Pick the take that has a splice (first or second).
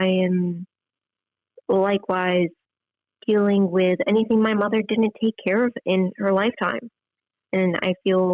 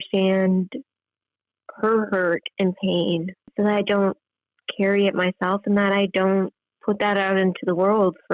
second